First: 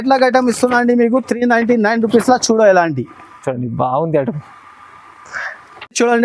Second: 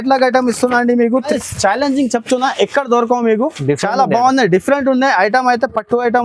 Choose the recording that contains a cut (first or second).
second